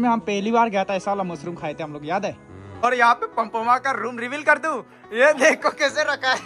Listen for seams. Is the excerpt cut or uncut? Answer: cut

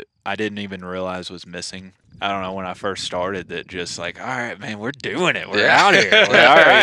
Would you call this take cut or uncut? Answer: cut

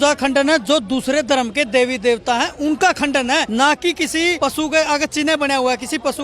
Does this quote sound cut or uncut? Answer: cut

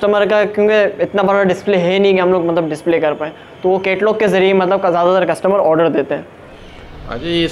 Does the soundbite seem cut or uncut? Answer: uncut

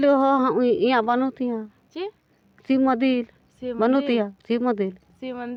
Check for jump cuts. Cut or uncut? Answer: uncut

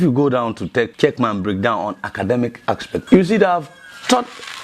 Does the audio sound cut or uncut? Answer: cut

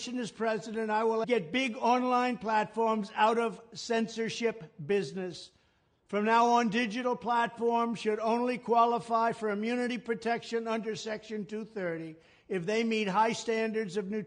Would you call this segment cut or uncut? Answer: cut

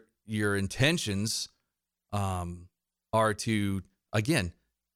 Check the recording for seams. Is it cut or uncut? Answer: uncut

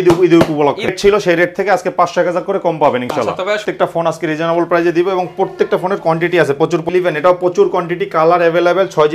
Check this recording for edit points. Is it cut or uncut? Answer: cut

